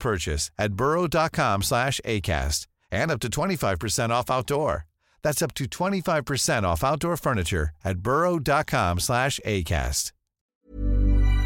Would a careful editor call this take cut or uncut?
cut